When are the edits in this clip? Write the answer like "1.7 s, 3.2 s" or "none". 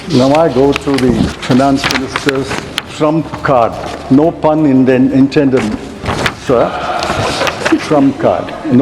1.3 s